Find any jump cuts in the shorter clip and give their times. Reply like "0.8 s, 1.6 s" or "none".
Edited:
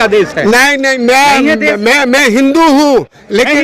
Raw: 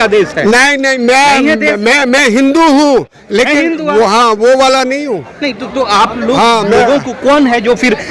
none